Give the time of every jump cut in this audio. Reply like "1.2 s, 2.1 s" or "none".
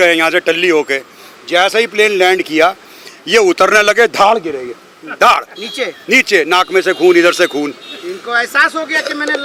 none